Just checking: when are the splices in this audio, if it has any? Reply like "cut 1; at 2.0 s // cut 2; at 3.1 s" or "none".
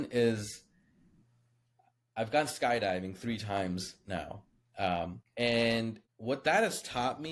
cut 1; at 5.2 s // cut 2; at 6.1 s